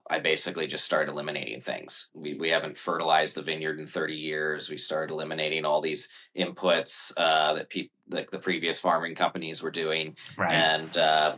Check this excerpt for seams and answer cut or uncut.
cut